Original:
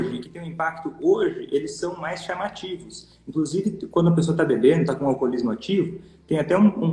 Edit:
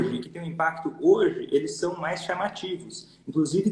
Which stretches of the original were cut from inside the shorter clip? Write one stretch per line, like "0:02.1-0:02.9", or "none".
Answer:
none